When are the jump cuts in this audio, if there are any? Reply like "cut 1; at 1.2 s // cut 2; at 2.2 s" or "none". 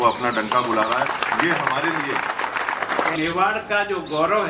cut 1; at 2.9 s